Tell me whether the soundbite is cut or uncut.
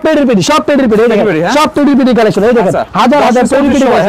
uncut